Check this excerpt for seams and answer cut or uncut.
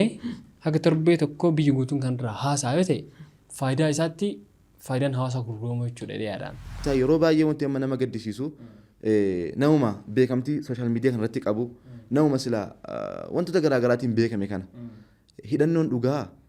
cut